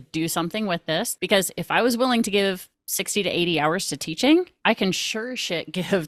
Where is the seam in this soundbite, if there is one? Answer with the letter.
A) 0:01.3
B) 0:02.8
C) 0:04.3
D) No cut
D